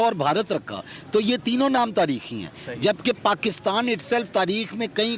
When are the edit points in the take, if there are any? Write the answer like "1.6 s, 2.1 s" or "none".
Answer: none